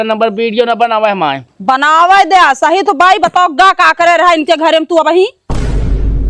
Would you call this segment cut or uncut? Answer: cut